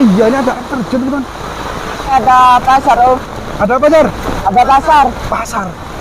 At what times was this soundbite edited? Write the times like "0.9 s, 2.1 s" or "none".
2.1 s